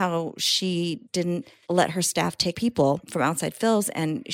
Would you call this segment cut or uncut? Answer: cut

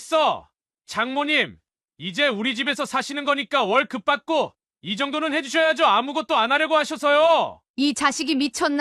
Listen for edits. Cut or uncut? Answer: cut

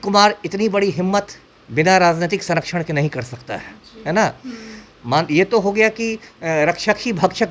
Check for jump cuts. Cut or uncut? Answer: uncut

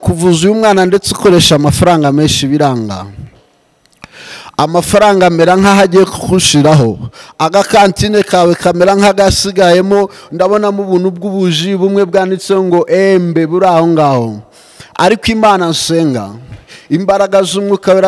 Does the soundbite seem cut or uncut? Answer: uncut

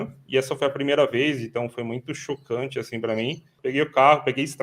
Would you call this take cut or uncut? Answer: cut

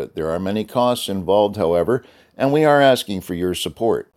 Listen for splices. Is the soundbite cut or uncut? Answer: uncut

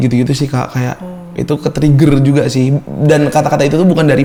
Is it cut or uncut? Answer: uncut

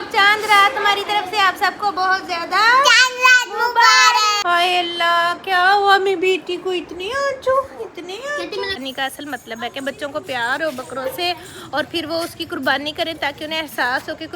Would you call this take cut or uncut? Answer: cut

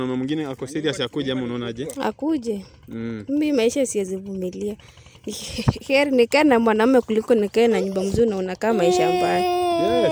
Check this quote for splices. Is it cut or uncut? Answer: uncut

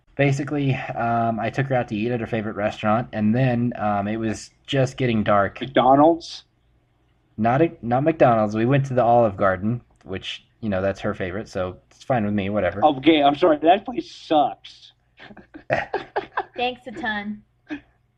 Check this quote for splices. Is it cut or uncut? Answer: uncut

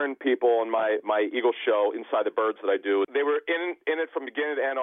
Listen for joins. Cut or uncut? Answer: cut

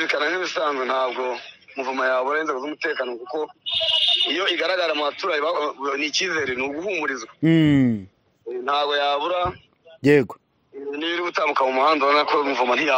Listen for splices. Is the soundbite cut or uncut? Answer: uncut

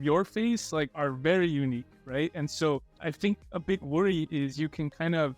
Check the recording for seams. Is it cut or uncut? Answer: cut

